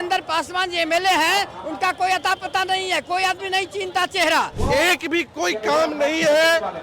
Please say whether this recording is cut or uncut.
cut